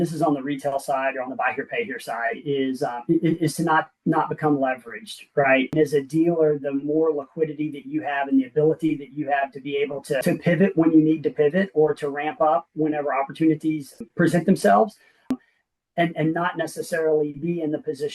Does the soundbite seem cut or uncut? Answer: cut